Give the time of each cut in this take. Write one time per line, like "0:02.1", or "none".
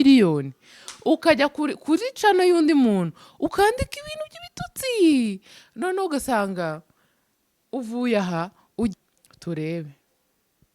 0:08.9